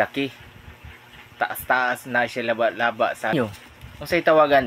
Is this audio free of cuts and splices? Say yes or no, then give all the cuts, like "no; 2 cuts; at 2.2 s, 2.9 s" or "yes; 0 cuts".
no; 1 cut; at 3.3 s